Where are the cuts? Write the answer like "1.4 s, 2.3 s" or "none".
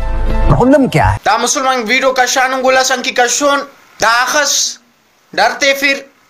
1.2 s, 3.8 s

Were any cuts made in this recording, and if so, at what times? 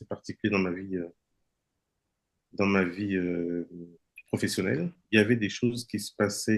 5.0 s

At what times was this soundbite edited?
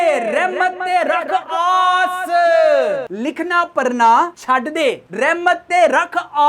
none

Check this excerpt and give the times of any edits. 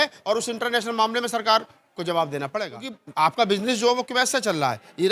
3.0 s

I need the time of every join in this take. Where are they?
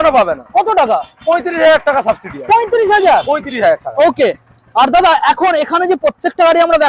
none

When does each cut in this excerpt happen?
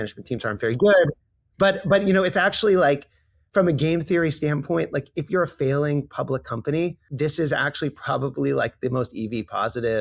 7.1 s

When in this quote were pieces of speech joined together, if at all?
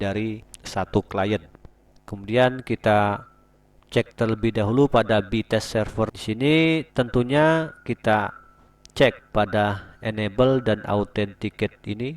1.6 s, 6.2 s

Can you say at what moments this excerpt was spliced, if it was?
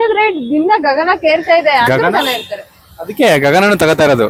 none

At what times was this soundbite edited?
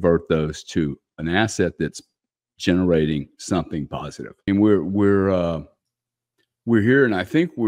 4.4 s

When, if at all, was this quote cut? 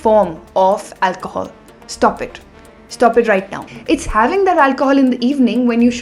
3.7 s

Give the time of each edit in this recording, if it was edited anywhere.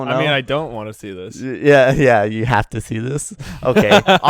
none

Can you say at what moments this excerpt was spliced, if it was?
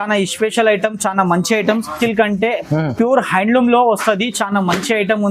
2.0 s

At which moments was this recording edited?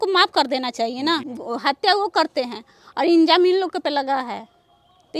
1.4 s

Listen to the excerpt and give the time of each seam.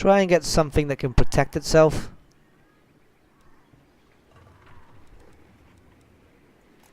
1.3 s

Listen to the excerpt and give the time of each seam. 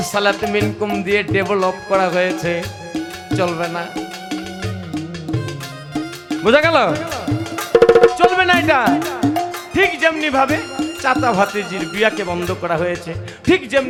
none

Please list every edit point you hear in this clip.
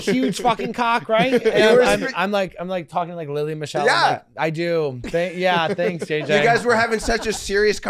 none

